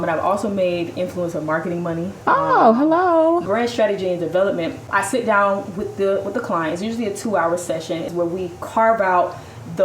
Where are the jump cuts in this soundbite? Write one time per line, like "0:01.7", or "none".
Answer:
0:03.4
0:04.8
0:08.1